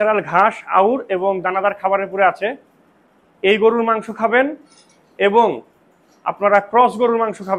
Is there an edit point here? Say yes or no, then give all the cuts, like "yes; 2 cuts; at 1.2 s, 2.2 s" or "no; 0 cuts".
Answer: no; 0 cuts